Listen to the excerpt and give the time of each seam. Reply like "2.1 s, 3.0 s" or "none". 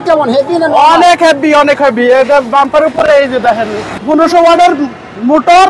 3.9 s